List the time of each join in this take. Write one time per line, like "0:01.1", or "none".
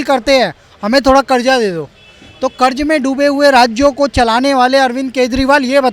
none